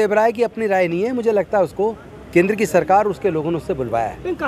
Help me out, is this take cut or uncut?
cut